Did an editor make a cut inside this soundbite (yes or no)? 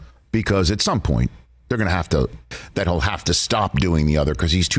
yes